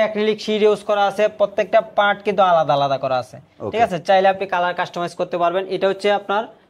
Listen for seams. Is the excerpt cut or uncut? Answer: uncut